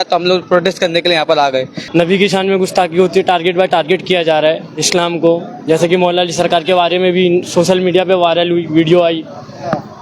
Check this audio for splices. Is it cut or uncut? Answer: cut